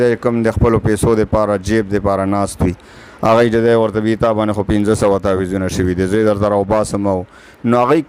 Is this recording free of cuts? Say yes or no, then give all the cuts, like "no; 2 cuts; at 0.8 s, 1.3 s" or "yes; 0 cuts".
yes; 0 cuts